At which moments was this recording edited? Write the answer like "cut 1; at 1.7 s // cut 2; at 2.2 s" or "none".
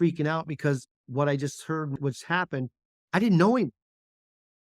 cut 1; at 2.0 s

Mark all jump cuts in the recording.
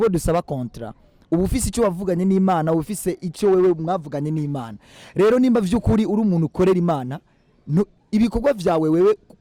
none

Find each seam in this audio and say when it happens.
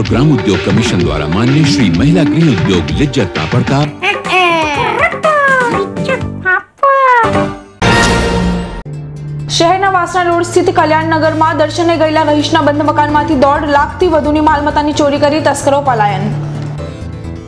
cut 1; at 7.7 s

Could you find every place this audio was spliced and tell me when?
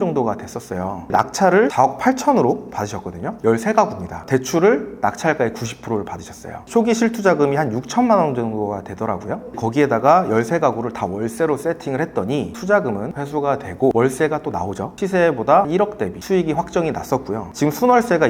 cut 1; at 1.7 s // cut 2; at 3.4 s // cut 3; at 6.6 s // cut 4; at 15.0 s

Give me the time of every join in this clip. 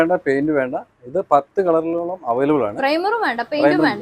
none

